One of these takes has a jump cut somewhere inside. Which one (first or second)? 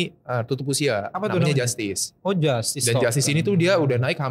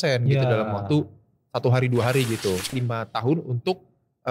second